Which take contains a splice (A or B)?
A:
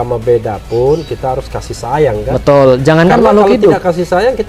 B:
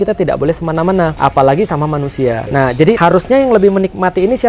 B